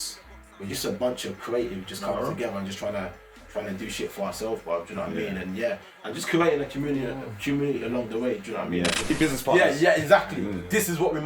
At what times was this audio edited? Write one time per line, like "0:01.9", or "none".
0:09.1